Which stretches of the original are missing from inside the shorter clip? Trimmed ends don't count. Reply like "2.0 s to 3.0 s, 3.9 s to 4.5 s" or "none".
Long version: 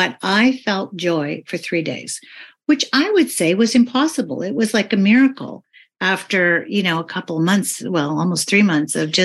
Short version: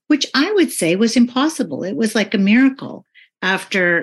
none